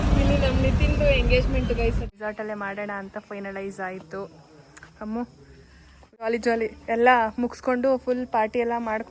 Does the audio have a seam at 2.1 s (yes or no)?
yes